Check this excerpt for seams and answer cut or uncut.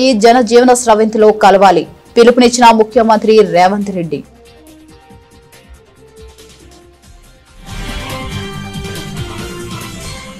cut